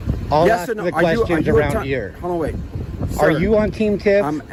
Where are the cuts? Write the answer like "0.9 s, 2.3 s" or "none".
none